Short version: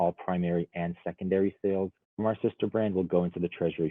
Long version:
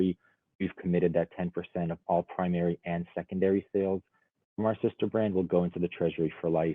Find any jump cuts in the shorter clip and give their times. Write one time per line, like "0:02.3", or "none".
0:02.0